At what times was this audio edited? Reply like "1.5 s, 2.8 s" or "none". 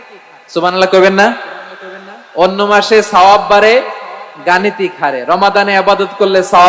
none